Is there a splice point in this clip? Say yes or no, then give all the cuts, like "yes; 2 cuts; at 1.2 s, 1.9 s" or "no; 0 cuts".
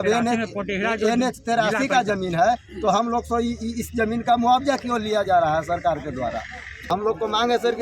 yes; 1 cut; at 6.6 s